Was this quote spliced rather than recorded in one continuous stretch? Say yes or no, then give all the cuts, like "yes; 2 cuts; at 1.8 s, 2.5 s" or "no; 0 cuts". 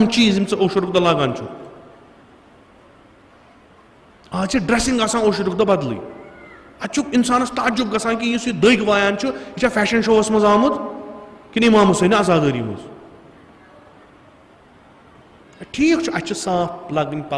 no; 0 cuts